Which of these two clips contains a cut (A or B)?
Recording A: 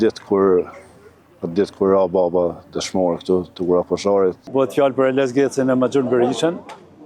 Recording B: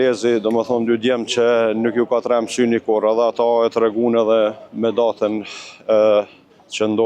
A